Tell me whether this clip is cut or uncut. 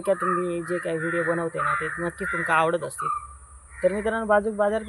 uncut